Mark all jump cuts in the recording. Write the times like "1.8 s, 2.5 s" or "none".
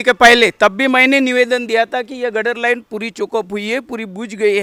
none